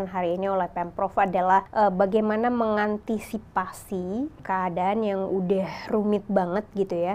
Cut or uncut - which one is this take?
cut